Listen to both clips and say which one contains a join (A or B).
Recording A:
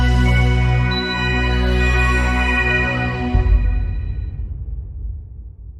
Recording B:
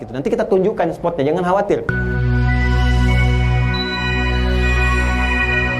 B